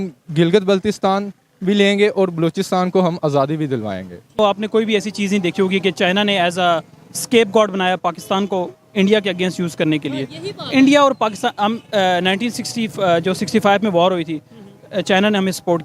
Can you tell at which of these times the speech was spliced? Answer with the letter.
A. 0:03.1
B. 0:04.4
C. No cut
B